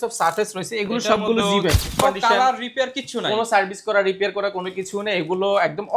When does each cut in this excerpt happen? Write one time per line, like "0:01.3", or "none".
0:02.0

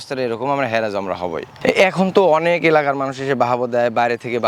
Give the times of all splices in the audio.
none

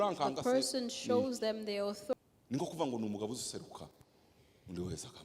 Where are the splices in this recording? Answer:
0:02.1

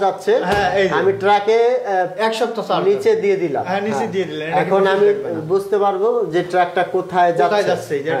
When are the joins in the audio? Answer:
none

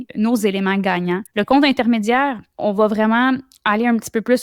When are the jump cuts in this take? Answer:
0:01.3
0:02.6

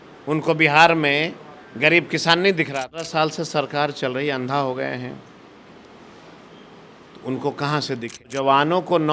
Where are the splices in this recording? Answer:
0:02.9
0:08.3

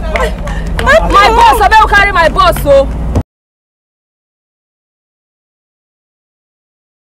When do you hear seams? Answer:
none

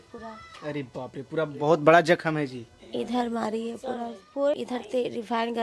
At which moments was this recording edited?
0:04.5

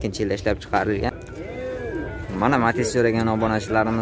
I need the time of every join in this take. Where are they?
0:01.1

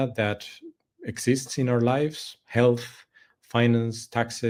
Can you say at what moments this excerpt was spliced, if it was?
none

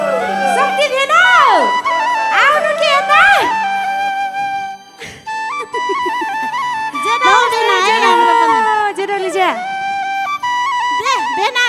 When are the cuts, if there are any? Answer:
none

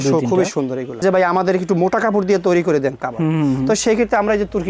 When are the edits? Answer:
0:01.0

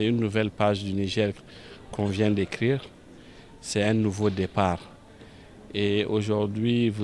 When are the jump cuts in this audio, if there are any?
none

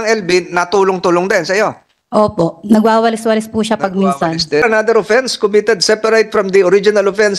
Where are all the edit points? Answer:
0:04.6

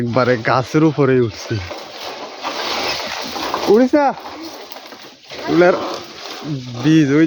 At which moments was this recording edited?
none

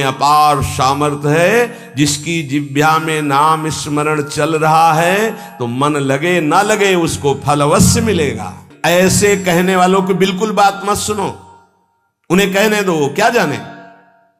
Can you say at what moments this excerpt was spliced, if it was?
0:08.7

